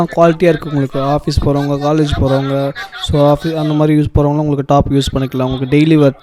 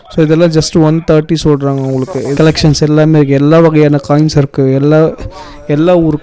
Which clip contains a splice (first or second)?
second